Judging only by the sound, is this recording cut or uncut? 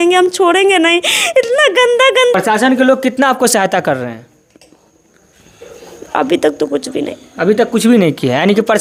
uncut